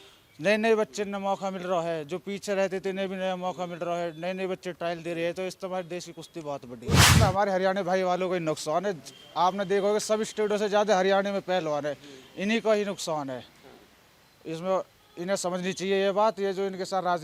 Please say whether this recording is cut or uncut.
cut